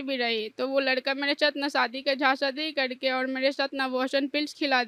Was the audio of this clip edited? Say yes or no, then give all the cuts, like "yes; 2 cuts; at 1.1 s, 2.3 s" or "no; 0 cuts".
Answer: no; 0 cuts